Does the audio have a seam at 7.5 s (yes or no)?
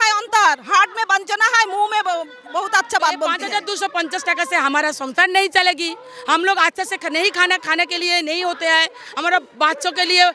no